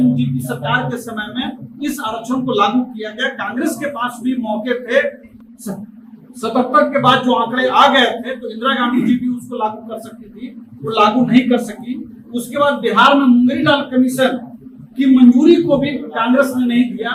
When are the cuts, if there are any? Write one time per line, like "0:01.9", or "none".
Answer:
none